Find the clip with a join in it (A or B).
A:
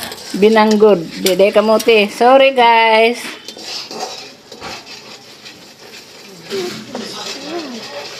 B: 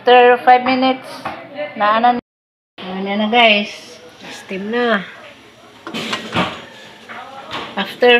B